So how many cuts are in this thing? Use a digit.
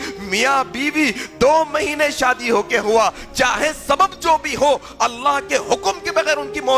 0